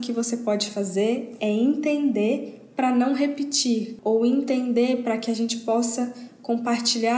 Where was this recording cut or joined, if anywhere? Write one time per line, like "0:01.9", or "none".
none